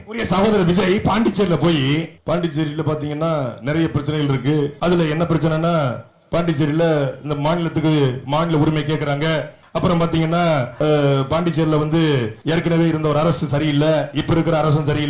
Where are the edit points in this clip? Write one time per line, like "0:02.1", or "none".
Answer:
0:02.1
0:04.7
0:09.6
0:10.7
0:12.3